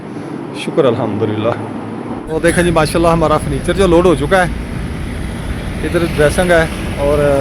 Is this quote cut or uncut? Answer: cut